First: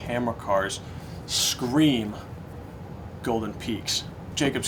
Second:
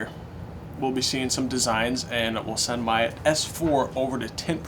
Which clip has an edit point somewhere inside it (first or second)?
second